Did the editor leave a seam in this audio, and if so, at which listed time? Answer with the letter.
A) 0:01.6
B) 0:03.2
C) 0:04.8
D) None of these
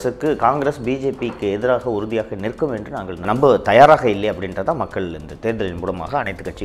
B